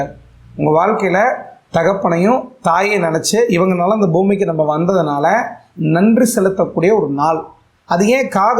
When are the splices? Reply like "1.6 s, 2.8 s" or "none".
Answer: none